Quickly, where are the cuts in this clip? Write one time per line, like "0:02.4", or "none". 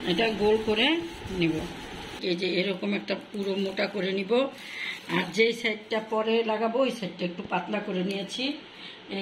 0:02.2